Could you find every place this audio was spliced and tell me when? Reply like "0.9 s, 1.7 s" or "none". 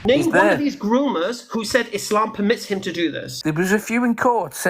3.4 s